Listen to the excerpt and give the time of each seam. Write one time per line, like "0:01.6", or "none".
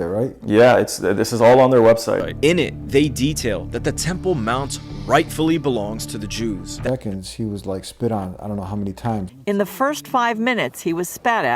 0:06.8
0:09.2